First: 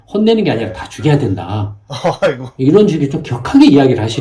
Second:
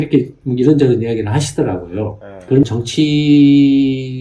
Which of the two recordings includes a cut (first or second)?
second